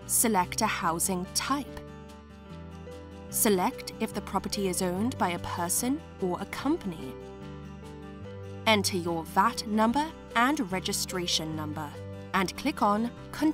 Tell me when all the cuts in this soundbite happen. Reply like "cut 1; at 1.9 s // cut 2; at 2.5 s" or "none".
cut 1; at 1.7 s // cut 2; at 3.3 s